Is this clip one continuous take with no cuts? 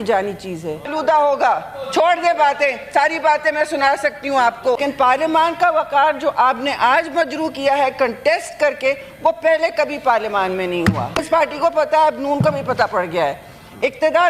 no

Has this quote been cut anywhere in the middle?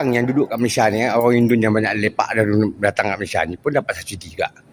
no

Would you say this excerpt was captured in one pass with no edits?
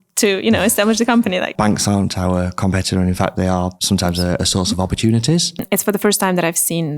no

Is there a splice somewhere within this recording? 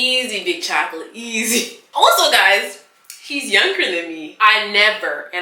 no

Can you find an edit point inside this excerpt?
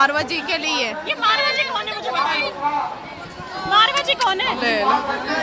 no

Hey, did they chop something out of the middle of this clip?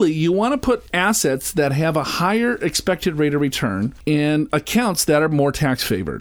yes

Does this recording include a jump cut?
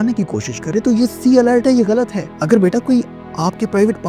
yes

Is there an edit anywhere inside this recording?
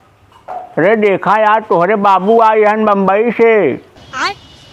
no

